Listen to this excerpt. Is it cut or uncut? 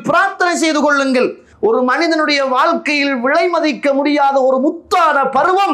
uncut